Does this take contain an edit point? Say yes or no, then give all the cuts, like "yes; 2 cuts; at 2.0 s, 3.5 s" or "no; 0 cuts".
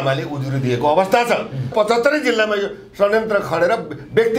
yes; 1 cut; at 1.7 s